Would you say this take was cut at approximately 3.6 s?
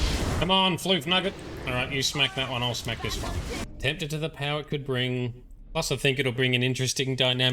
yes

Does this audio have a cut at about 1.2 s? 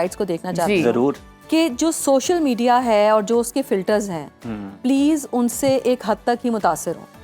no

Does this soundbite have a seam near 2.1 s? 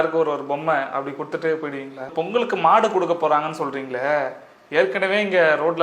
yes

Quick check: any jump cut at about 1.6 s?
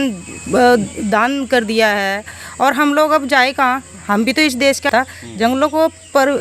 no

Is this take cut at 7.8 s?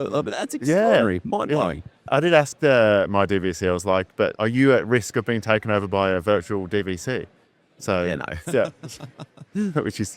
no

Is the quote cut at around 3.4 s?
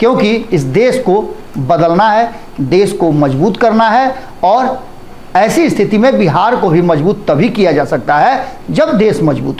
no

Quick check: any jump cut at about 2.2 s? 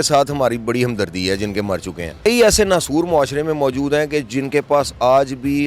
yes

